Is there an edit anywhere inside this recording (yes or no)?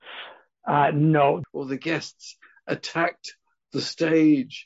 yes